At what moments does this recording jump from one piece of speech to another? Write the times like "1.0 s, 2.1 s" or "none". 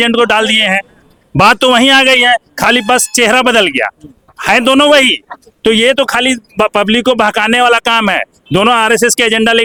none

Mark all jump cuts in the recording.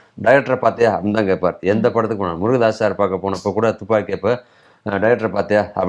none

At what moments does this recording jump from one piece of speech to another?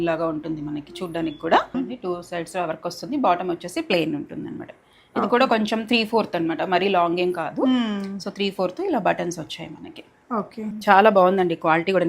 1.7 s, 10.8 s

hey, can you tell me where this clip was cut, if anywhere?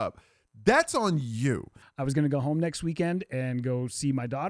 1.8 s

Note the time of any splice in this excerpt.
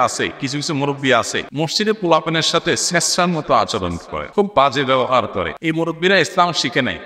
1.4 s, 4.2 s, 5.5 s

